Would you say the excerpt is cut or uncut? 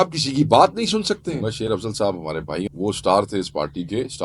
cut